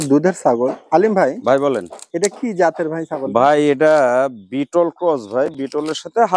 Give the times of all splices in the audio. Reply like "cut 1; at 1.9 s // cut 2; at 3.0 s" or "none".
none

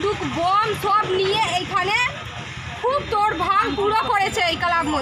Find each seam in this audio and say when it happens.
none

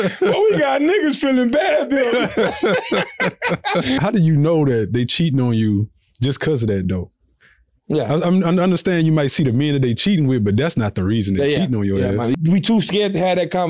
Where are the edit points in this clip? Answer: cut 1; at 4.0 s // cut 2; at 12.4 s

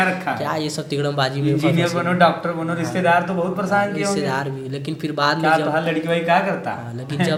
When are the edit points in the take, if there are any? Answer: none

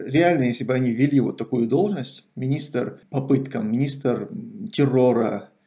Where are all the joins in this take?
cut 1; at 3.0 s

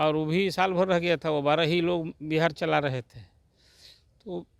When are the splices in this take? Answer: none

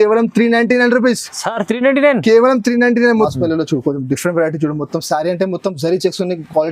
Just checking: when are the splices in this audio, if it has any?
cut 1; at 3.3 s

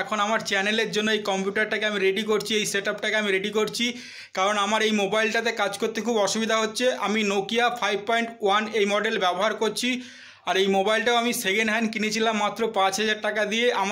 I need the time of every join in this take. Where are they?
none

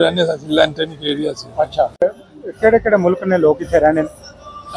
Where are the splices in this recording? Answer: cut 1; at 2.0 s

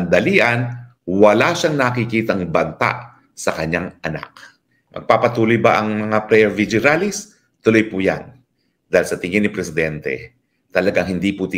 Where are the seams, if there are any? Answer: cut 1; at 4.8 s

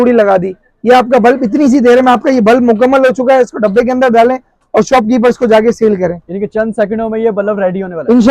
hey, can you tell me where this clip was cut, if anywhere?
none

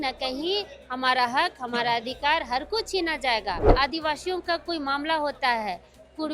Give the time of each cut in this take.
cut 1; at 3.7 s

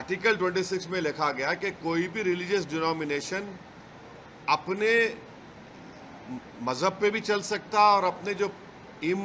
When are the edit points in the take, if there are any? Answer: none

